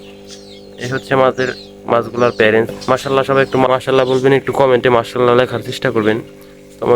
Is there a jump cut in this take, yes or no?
yes